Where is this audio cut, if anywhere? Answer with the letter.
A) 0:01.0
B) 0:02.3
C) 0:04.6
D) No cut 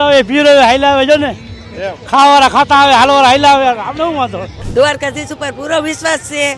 C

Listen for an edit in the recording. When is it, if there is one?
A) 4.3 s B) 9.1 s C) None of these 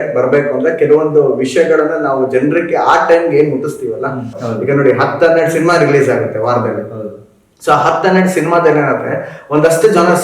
A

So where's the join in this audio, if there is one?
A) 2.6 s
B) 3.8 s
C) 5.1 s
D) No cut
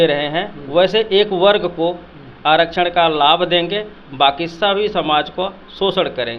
D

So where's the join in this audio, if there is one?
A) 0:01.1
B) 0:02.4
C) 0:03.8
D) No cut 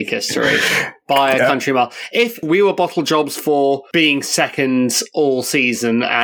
B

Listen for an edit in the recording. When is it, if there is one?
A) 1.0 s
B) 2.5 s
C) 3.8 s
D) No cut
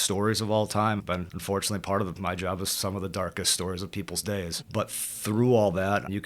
A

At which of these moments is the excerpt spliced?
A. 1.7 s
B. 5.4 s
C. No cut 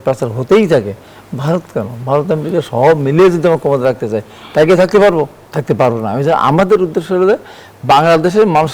B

